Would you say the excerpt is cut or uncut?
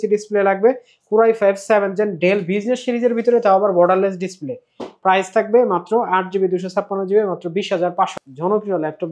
cut